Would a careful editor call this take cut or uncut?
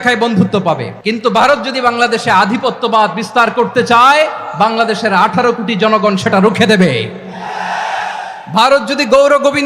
cut